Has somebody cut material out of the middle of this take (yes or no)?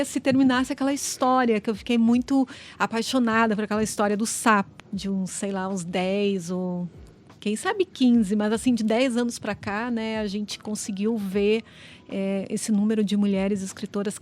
yes